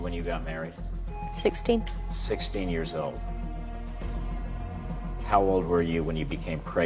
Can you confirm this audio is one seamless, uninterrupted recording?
yes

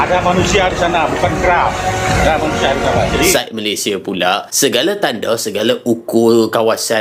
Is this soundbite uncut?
no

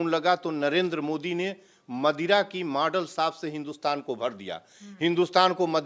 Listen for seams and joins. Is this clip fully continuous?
yes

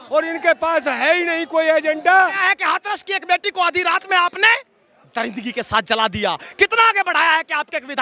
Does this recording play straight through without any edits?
no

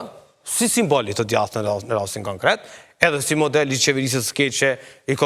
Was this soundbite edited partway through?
no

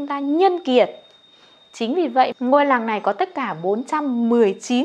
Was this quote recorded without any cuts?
no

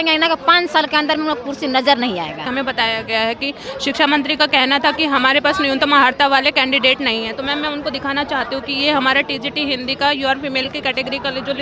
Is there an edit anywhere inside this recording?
yes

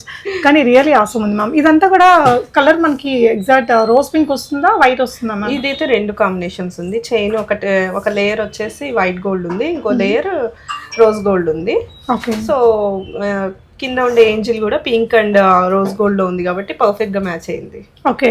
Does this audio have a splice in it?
no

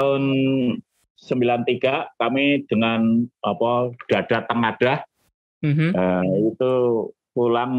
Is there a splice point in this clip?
no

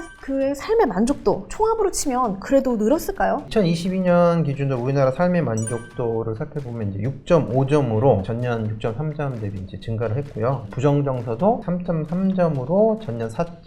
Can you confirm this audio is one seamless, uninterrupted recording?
no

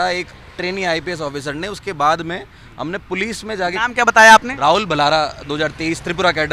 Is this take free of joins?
yes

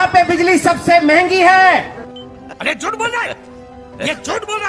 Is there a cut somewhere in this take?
no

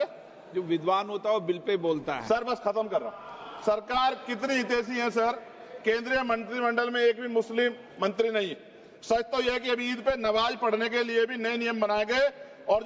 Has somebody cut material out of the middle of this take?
no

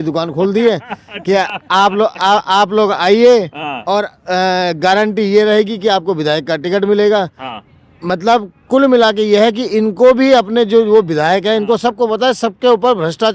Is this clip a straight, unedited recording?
yes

